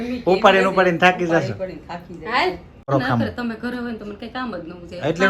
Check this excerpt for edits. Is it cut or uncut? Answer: cut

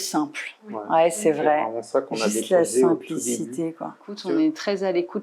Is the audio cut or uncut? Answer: cut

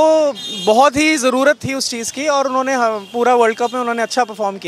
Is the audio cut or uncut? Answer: uncut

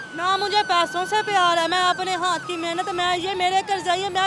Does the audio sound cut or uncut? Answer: uncut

